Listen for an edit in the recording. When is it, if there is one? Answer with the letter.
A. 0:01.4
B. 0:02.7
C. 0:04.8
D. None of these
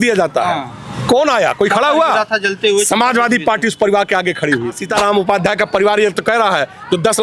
C